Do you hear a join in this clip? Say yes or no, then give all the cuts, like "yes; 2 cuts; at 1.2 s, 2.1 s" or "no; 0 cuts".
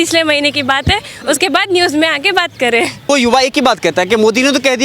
yes; 1 cut; at 3.1 s